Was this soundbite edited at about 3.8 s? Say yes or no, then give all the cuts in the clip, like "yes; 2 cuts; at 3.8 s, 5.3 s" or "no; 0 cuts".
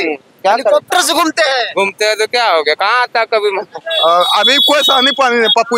yes; 1 cut; at 3.8 s